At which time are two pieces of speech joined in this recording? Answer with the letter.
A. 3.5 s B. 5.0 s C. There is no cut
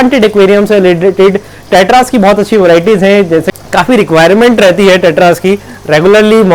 A